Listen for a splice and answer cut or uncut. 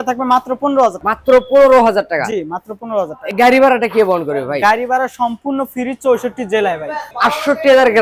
uncut